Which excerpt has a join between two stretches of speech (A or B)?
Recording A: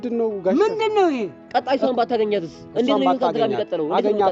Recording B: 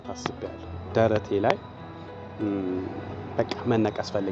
A